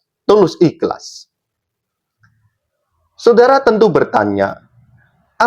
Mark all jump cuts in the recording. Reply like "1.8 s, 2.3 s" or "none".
none